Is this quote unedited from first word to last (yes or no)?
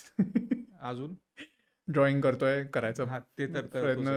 yes